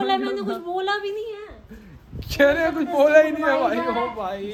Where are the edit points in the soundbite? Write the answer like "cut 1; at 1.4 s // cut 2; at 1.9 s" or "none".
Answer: none